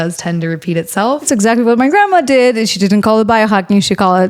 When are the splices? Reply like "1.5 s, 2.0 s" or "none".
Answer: 1.3 s